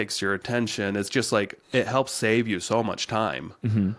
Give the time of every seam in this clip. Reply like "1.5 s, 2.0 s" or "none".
1.6 s